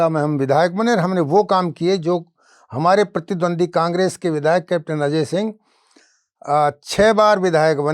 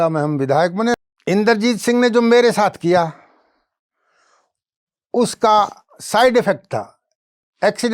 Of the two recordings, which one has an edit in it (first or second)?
second